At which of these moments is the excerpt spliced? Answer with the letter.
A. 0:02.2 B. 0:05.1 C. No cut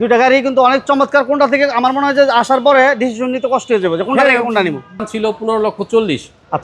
B